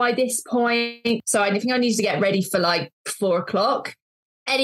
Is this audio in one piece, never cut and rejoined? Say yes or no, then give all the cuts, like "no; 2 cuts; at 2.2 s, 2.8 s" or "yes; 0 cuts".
no; 1 cut; at 1.2 s